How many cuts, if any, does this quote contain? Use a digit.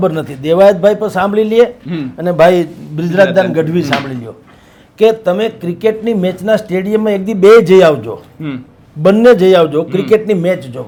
0